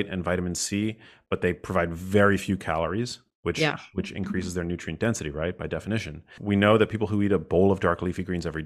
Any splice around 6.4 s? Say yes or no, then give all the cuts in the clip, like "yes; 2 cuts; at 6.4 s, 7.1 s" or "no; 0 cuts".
yes; 1 cut; at 6.4 s